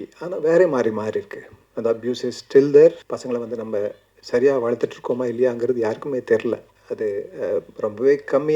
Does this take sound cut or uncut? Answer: cut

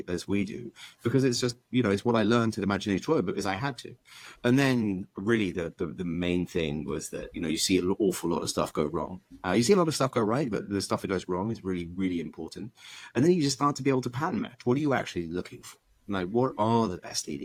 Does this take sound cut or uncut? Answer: uncut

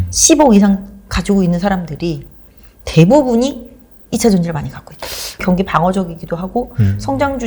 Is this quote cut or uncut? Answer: cut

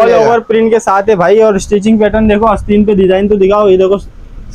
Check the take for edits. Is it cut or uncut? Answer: uncut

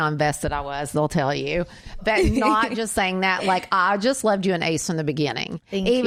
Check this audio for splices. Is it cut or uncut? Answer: uncut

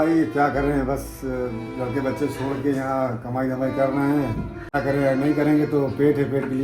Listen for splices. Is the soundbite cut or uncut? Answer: cut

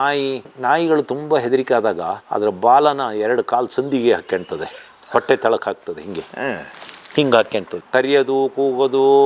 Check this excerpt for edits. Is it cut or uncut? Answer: cut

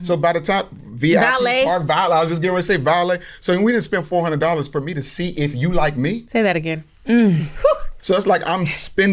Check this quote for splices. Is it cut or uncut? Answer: cut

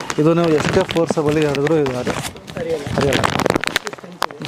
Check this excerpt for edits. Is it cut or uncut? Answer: uncut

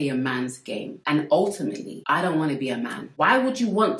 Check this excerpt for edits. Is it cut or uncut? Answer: cut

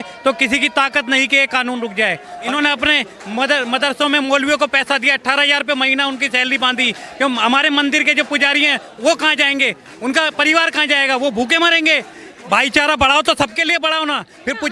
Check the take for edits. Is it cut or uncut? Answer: cut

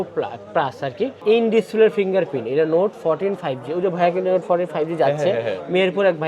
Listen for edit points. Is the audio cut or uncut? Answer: cut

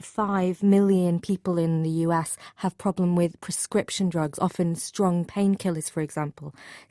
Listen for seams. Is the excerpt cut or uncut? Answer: uncut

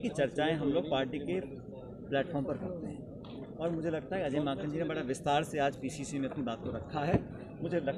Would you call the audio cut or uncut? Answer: uncut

